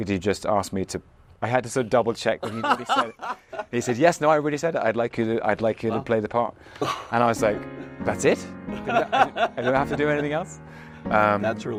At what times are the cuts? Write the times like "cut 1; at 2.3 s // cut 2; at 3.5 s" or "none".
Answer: none